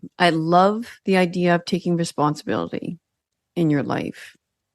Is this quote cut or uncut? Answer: cut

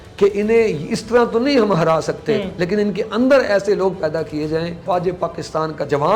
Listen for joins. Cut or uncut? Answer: cut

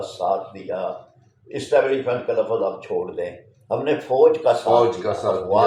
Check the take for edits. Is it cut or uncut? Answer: uncut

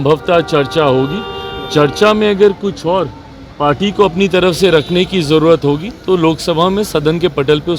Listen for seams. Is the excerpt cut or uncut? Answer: uncut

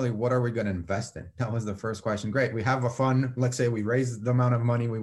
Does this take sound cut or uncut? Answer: uncut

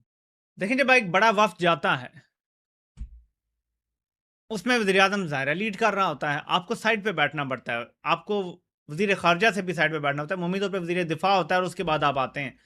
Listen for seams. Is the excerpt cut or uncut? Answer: uncut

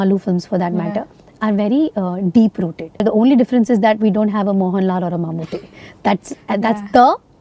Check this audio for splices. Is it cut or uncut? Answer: cut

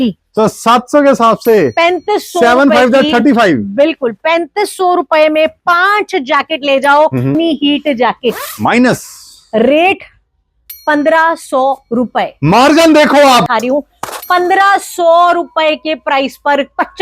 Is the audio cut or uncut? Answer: cut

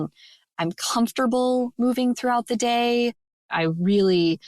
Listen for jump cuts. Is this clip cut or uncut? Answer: cut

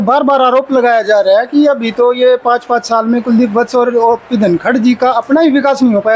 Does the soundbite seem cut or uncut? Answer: uncut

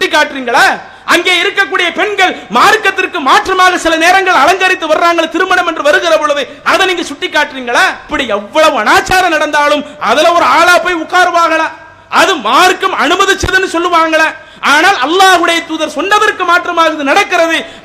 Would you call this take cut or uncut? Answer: cut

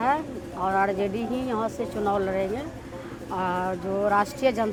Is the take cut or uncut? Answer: uncut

